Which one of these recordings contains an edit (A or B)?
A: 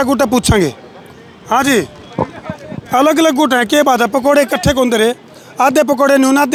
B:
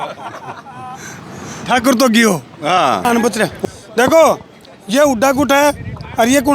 B